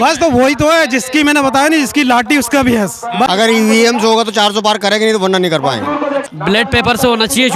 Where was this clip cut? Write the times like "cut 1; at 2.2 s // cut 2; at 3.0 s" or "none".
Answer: cut 1; at 3.3 s // cut 2; at 6.2 s